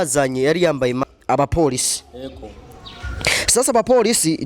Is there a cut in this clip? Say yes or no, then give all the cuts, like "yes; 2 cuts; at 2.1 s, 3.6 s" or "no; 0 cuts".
yes; 1 cut; at 1.1 s